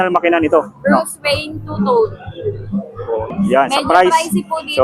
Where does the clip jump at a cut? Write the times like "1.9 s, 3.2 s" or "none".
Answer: 3.3 s